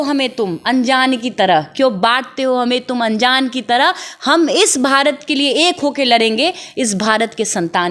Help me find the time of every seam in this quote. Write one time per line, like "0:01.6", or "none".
none

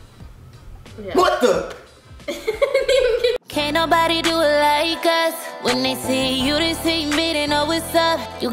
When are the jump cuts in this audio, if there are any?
0:03.4

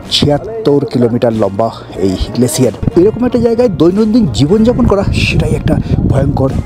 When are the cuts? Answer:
0:02.8

